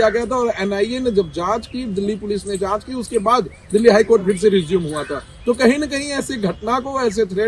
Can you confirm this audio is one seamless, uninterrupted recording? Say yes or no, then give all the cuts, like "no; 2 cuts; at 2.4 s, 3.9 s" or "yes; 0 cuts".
yes; 0 cuts